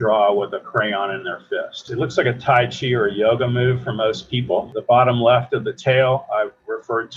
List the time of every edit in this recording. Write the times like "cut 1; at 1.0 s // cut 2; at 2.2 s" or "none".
cut 1; at 1.9 s // cut 2; at 4.7 s